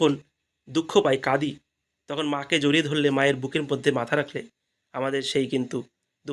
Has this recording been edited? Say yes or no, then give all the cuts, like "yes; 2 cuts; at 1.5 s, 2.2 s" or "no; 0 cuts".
no; 0 cuts